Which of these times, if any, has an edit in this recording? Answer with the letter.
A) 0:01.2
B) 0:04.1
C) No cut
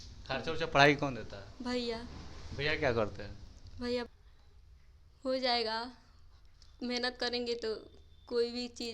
B